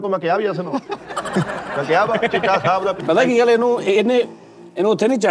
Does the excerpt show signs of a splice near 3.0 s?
yes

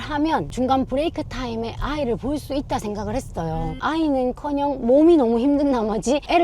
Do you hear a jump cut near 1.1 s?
no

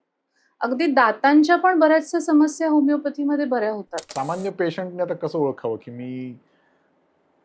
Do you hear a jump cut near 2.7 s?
no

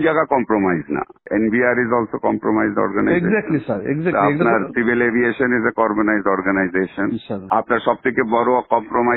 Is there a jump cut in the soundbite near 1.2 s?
yes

